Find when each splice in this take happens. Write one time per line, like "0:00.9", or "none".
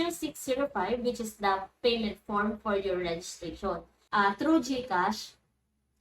0:03.9